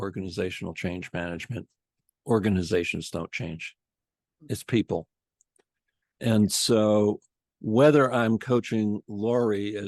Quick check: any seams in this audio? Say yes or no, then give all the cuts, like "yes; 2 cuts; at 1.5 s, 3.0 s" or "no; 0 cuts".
no; 0 cuts